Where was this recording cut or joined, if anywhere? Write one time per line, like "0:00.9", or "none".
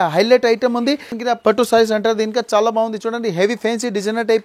0:01.1